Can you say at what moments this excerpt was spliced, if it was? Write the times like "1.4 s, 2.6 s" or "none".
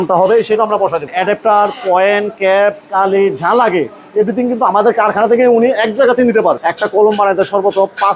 1.1 s, 6.7 s